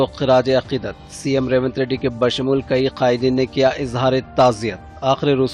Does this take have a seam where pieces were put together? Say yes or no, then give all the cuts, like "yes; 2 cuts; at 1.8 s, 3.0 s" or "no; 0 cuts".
no; 0 cuts